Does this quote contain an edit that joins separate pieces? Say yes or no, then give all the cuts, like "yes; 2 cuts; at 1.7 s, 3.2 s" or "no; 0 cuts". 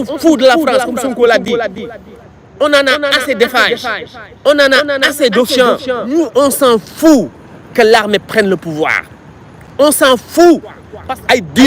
yes; 2 cuts; at 6.0 s, 10.6 s